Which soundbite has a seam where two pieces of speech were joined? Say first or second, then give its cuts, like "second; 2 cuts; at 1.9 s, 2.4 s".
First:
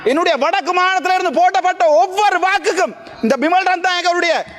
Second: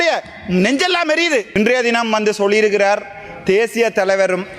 second; 1 cut; at 1.6 s